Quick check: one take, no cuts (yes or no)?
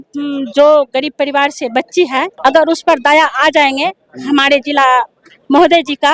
no